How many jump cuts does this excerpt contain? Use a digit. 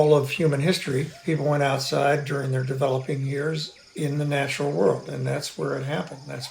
0